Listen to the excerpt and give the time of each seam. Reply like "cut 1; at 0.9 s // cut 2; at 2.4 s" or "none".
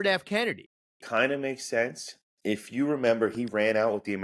cut 1; at 0.9 s